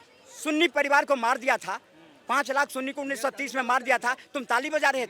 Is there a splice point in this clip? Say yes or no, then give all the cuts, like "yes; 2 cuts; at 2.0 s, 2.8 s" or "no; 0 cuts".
no; 0 cuts